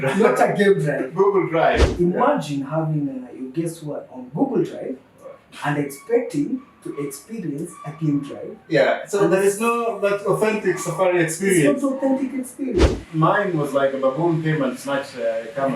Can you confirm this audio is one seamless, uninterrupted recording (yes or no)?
no